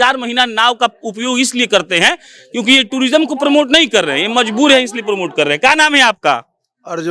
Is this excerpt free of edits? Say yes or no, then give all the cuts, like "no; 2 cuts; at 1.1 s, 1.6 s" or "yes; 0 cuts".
yes; 0 cuts